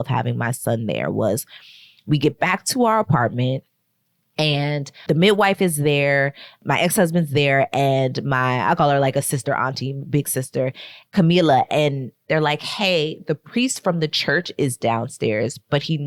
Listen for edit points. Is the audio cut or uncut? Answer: uncut